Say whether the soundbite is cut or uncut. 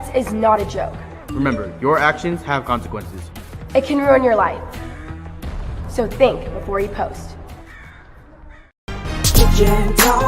cut